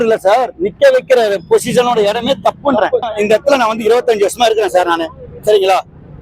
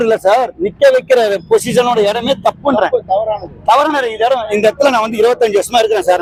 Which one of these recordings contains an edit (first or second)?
first